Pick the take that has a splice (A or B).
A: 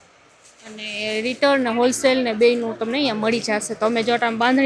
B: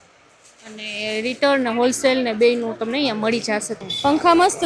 B